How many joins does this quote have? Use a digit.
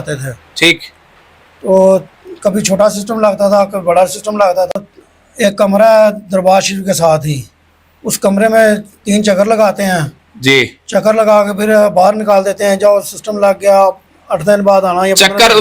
1